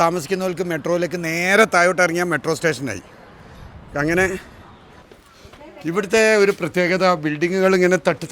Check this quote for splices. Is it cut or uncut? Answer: cut